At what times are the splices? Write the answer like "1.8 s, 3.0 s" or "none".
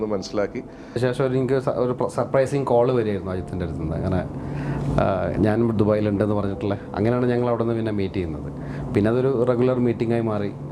1.0 s